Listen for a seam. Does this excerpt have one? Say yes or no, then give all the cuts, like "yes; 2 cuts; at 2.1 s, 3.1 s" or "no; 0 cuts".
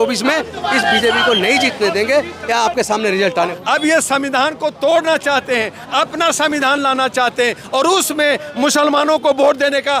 yes; 1 cut; at 3.5 s